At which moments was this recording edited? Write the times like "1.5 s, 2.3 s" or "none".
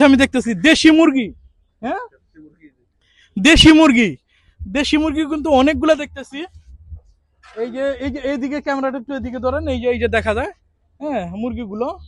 none